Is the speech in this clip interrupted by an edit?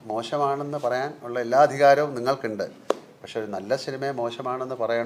no; 0 cuts

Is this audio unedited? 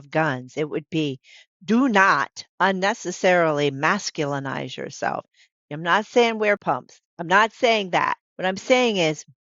no; 2 cuts; at 6.6 s, 8.3 s

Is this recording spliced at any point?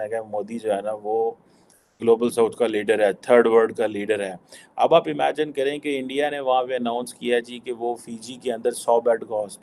no; 0 cuts

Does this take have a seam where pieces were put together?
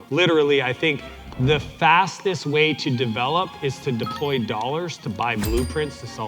no; 0 cuts

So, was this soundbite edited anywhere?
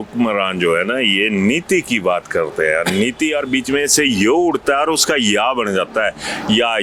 no; 0 cuts

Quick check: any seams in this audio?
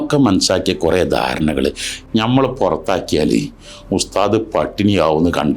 yes; 1 cut; at 2.0 s

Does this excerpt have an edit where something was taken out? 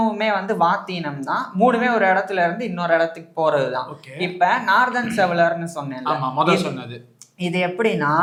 no; 0 cuts

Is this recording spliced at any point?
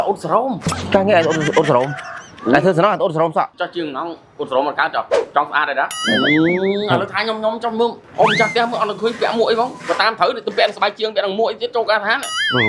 yes; 2 cuts; at 3.5 s, 6.0 s

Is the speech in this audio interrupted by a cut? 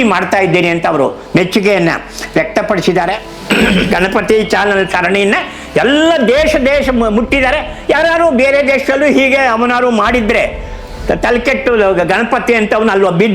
yes; 1 cut; at 3.3 s

